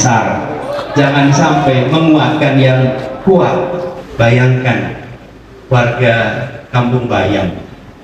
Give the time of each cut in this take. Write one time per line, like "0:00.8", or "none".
0:04.0